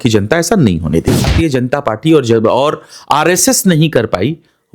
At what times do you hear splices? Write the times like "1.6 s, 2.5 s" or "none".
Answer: 1.3 s

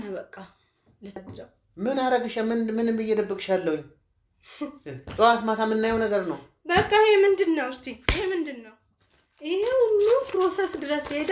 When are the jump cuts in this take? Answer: 1.4 s

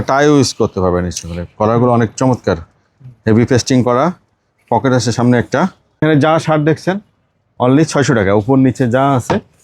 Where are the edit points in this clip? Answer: 6.0 s

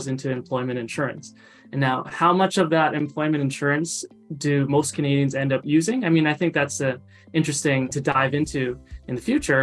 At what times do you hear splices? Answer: none

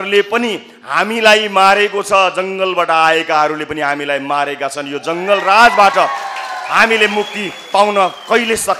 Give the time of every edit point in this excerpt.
none

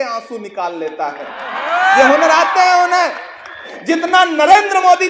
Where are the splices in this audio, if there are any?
3.7 s

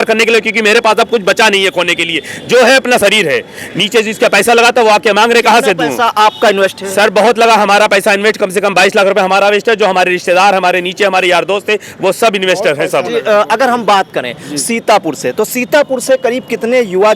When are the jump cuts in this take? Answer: none

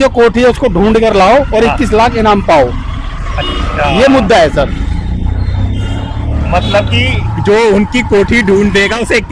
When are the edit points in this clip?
none

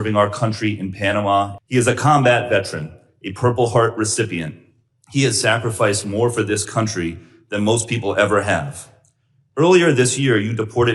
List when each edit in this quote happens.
1.6 s

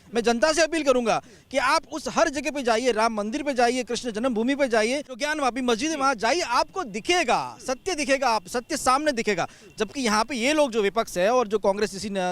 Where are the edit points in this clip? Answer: 5.3 s

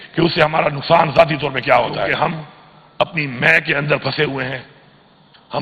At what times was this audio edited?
2.1 s

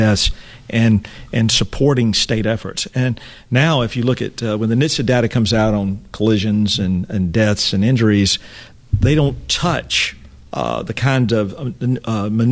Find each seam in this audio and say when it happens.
none

